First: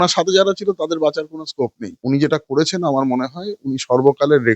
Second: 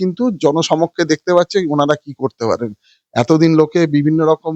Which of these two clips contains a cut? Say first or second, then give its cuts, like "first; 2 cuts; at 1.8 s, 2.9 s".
first; 1 cut; at 1.9 s